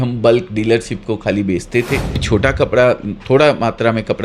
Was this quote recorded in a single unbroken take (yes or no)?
no